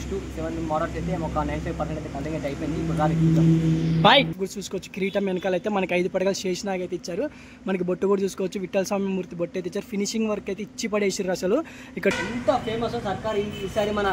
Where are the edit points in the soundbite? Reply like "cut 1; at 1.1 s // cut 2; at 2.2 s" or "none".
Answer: cut 1; at 4.4 s // cut 2; at 12.1 s